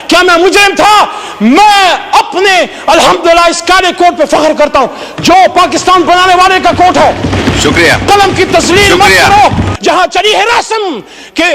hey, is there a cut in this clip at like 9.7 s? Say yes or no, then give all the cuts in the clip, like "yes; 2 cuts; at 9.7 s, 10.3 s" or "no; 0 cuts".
yes; 1 cut; at 9.7 s